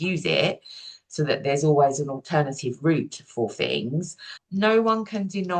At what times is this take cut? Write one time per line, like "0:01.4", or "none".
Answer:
0:04.4

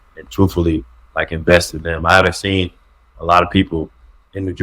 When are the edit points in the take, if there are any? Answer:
0:03.1

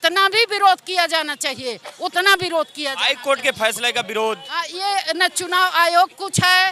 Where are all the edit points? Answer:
none

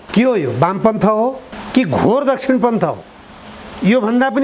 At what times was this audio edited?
0:01.5

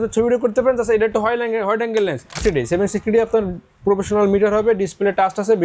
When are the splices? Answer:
0:02.4

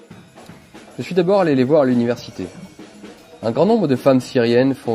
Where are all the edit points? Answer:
0:03.4

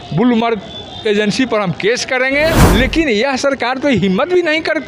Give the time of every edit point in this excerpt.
0:02.6

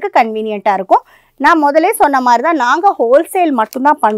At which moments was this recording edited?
none

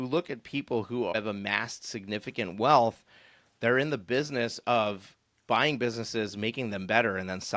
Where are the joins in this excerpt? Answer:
0:01.1

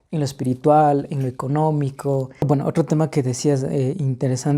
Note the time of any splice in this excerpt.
0:02.3

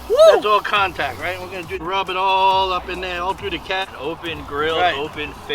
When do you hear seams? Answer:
0:01.8
0:03.8

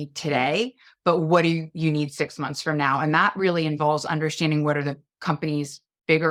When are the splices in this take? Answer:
none

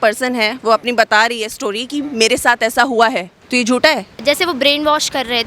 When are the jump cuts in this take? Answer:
0:03.3
0:04.1

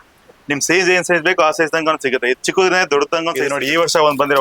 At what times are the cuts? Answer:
0:03.4

